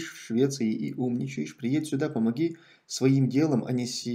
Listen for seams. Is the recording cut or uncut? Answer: uncut